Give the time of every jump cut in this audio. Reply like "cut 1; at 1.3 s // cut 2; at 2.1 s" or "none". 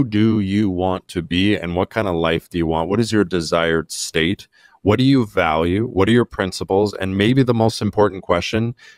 none